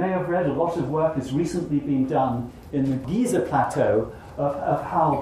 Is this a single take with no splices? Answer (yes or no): no